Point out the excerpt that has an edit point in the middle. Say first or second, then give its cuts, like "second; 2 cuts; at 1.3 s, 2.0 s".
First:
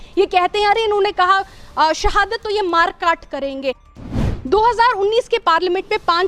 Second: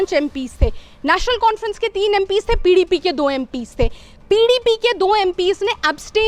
first; 1 cut; at 4.1 s